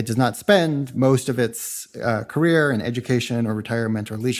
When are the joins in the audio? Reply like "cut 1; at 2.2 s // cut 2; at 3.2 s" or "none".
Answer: none